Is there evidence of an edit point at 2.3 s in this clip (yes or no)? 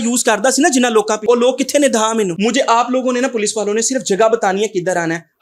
yes